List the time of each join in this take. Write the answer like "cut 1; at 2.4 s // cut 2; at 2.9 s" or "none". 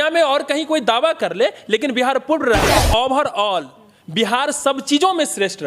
cut 1; at 2.8 s